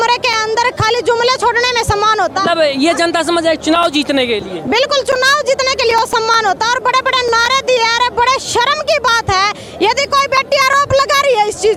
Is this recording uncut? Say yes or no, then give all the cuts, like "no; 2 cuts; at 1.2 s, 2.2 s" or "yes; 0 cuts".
yes; 0 cuts